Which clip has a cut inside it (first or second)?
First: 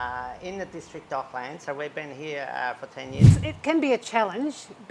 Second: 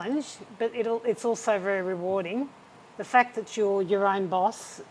first